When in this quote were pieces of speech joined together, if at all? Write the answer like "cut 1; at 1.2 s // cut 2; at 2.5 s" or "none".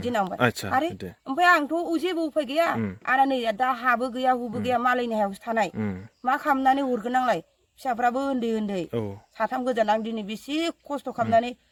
none